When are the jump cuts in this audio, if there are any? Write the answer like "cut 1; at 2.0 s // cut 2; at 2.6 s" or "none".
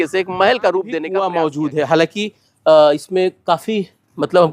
cut 1; at 1.1 s